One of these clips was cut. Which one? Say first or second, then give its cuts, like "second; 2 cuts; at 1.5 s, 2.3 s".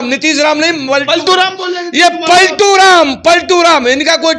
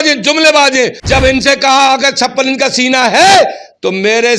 second; 1 cut; at 1.0 s